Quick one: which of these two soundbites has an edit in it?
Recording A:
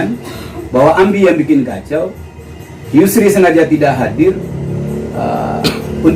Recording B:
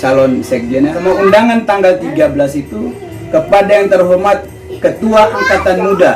B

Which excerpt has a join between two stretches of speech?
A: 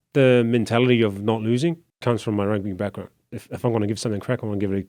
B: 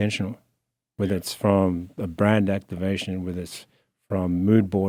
A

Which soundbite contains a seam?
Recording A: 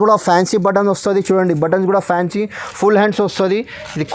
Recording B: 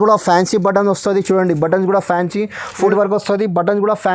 B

